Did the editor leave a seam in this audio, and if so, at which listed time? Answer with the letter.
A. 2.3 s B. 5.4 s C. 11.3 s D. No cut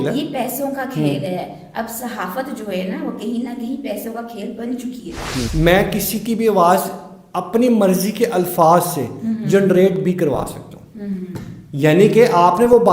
B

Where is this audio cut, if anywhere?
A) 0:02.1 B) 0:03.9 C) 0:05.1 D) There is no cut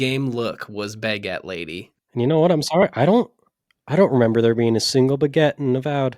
A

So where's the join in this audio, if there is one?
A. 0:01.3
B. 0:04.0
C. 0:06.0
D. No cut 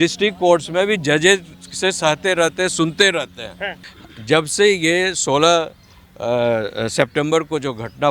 B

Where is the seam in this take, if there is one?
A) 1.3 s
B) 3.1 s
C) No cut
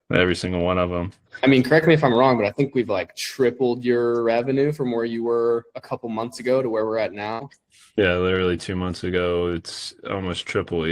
A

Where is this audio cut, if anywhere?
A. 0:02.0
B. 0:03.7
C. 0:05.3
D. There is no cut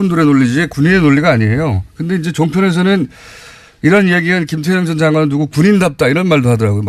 B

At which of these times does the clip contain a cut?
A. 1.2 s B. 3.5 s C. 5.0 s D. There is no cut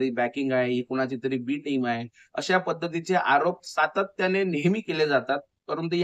D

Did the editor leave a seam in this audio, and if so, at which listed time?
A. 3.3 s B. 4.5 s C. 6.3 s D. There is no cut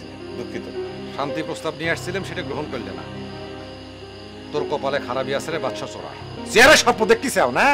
C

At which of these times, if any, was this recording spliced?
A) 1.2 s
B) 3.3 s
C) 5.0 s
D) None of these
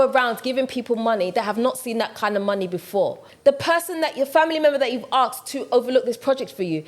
B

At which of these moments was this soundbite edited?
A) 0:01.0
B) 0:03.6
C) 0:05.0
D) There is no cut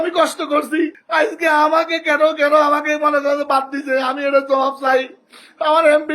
A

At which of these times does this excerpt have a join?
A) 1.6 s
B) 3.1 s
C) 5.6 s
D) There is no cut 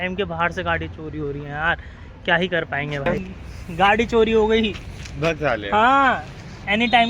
B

